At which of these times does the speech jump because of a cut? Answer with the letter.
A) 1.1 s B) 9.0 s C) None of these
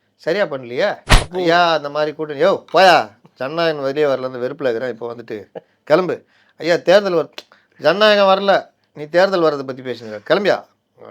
A